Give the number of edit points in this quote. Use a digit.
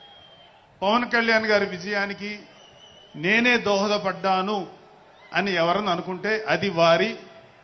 0